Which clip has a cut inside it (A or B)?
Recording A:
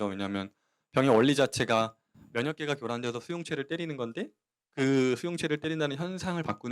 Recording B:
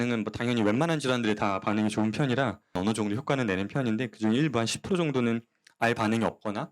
B